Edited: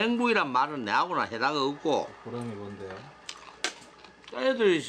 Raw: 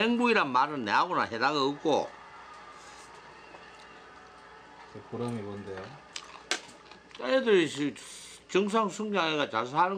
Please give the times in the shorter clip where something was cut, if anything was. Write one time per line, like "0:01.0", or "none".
0:02.2